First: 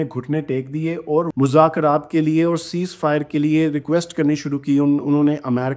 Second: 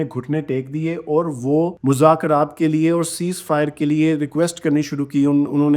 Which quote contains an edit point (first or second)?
first